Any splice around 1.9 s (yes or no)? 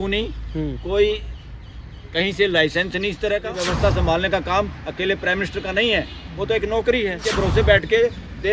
no